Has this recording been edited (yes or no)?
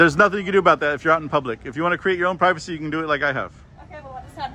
no